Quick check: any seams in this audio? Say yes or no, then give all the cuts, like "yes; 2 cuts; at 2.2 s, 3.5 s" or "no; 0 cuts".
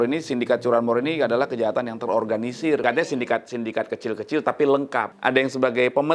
yes; 2 cuts; at 2.8 s, 5.1 s